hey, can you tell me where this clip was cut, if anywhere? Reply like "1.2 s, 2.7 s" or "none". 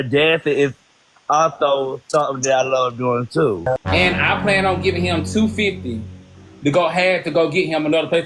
4.1 s

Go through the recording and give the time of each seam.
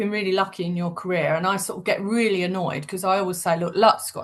none

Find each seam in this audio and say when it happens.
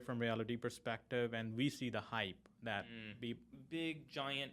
3.5 s

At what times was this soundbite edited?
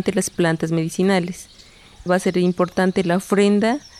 2.0 s

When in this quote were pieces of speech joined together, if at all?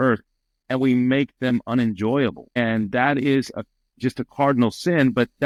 none

